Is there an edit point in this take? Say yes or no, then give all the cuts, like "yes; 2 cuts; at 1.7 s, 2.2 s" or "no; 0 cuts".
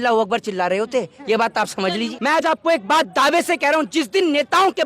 yes; 1 cut; at 2.1 s